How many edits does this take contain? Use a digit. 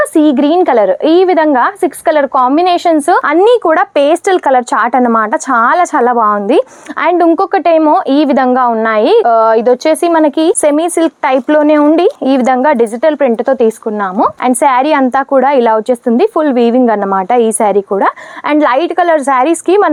0